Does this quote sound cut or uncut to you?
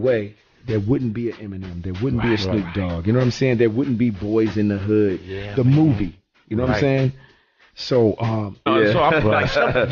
uncut